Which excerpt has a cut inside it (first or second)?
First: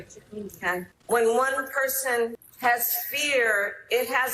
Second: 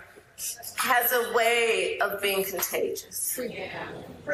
first